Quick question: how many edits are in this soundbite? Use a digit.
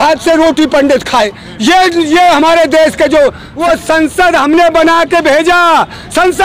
1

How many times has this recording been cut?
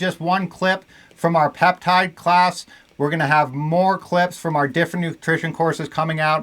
0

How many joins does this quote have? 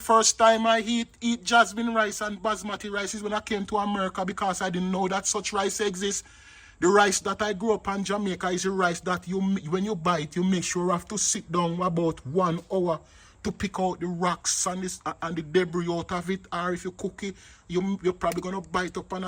0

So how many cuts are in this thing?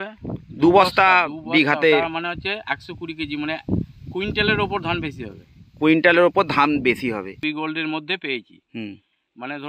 1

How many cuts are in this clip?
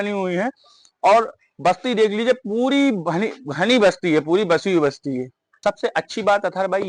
1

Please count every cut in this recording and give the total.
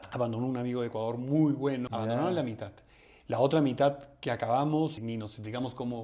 2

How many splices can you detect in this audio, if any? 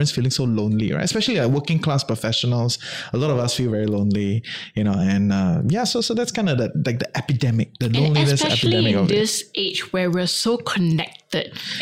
0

